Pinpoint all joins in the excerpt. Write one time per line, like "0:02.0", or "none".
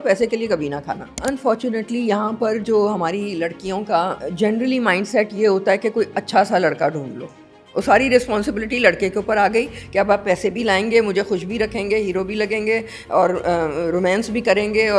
0:01.0
0:04.2